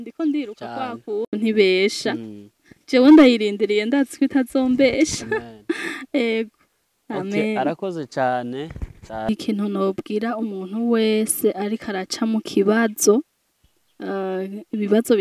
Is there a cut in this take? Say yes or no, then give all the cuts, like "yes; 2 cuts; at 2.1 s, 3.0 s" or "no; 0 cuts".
yes; 1 cut; at 9.3 s